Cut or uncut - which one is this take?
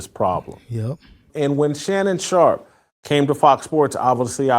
cut